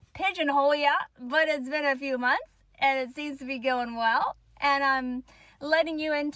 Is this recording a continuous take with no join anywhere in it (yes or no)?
no